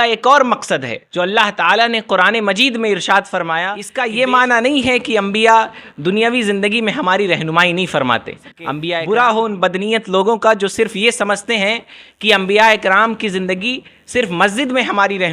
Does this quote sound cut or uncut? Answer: cut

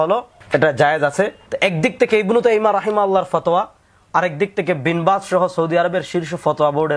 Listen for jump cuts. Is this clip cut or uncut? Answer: cut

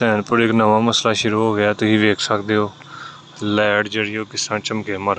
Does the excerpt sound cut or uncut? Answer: uncut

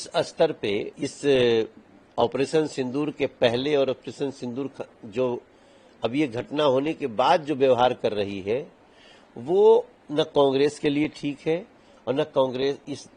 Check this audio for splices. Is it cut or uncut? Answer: cut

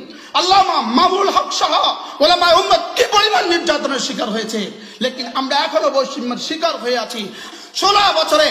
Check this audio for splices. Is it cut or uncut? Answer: cut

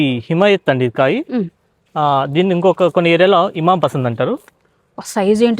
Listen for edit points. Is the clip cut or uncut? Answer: uncut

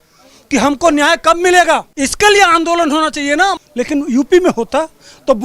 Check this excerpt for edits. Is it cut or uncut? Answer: cut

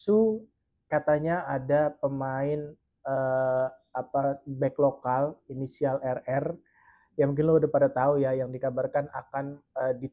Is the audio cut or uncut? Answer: uncut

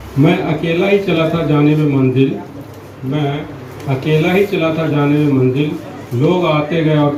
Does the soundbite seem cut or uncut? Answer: uncut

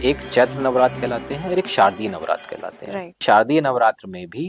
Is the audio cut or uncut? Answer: cut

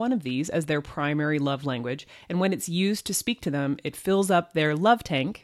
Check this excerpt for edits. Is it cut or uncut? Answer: uncut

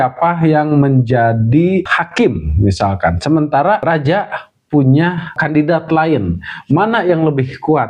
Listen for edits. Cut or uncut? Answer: cut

